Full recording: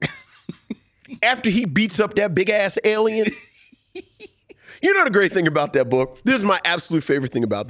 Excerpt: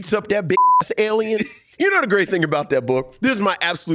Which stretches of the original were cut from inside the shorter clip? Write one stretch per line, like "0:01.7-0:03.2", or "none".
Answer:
0:03.5-0:04.6